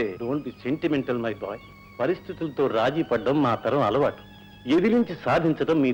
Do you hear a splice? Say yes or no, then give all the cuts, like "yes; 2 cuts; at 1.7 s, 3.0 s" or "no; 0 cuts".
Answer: no; 0 cuts